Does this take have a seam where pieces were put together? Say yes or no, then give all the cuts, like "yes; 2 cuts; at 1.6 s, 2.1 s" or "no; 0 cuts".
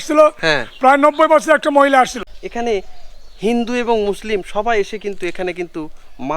yes; 1 cut; at 2.3 s